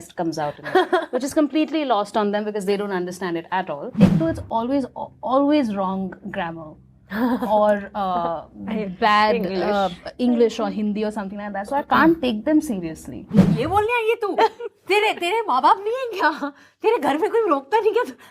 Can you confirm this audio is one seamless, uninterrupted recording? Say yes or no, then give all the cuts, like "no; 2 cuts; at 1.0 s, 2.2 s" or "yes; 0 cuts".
no; 2 cuts; at 3.9 s, 13.4 s